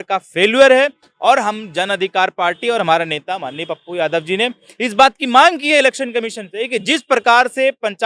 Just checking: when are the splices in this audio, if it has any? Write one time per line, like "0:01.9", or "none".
none